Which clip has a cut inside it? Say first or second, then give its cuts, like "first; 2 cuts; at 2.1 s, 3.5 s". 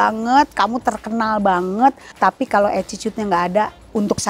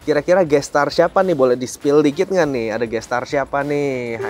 first; 1 cut; at 2.1 s